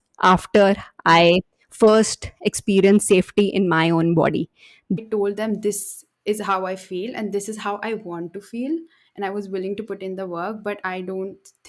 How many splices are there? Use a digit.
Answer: 1